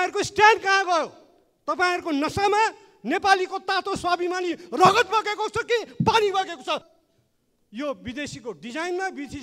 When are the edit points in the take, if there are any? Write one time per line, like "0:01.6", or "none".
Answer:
0:06.9